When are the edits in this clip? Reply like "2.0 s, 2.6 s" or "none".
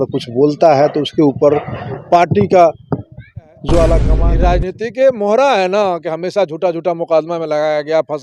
4.2 s

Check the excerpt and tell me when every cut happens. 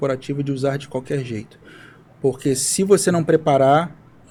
none

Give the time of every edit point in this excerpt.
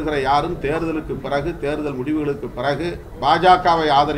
3.1 s

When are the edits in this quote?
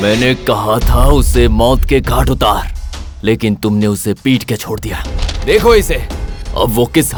none

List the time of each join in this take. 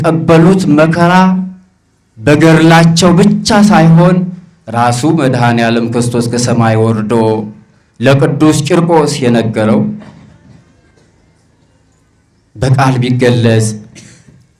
none

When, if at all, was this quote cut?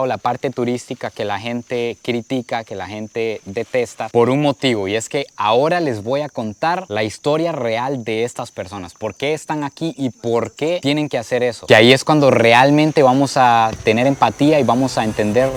none

